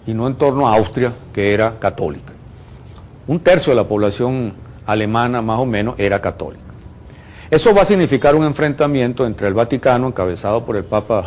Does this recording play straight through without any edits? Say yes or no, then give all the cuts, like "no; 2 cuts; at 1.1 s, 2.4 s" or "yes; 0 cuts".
no; 1 cut; at 2.2 s